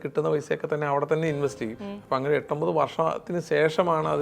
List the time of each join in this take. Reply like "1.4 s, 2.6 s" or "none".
1.8 s